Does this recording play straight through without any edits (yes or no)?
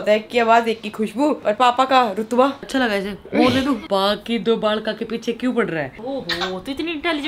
no